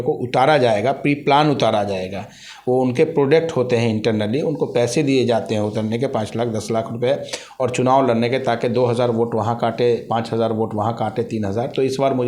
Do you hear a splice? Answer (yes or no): no